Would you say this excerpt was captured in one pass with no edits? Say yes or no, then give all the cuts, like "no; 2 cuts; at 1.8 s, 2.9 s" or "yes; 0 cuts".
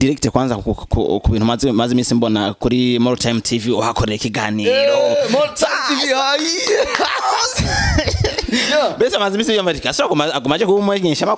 yes; 0 cuts